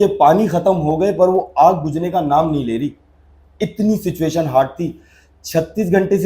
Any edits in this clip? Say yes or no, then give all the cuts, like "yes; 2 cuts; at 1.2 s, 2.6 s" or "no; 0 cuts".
no; 0 cuts